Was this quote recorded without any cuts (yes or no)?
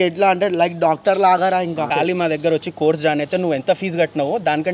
no